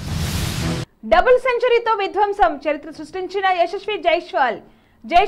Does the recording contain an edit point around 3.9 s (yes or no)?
no